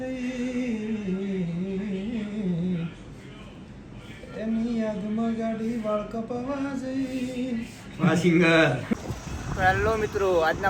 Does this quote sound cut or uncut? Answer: cut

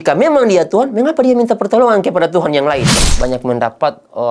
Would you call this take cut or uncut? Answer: cut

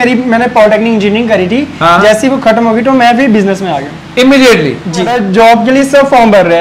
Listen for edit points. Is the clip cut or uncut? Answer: cut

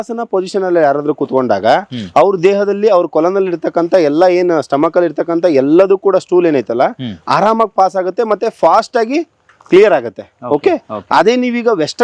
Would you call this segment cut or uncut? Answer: uncut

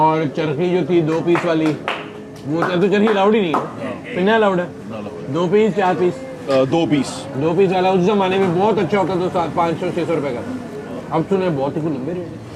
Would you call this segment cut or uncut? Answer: uncut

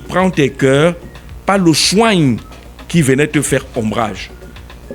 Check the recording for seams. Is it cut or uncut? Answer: uncut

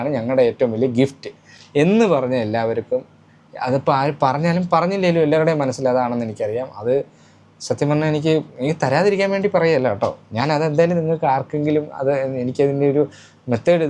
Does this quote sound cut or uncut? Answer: uncut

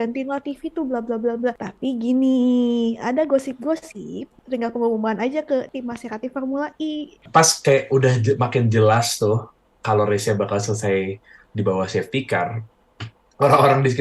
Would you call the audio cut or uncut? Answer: cut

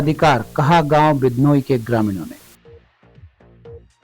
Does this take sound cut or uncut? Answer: cut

